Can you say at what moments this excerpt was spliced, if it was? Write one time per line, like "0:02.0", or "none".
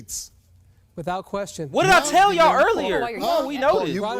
none